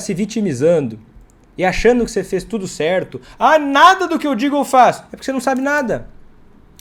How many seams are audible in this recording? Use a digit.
0